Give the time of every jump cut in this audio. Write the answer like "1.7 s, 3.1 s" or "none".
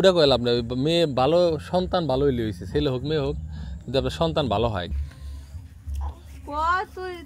4.9 s